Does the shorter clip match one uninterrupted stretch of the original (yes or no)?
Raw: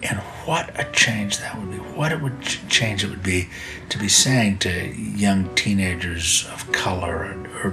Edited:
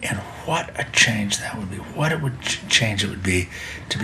yes